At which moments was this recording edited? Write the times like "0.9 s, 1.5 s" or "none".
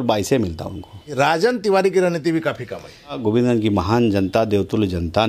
1.2 s, 3.2 s